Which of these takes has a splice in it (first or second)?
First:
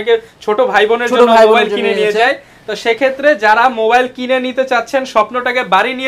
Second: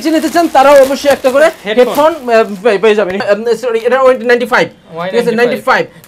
second